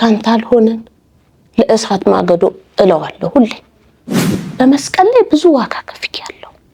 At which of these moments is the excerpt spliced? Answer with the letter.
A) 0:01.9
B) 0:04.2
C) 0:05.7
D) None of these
B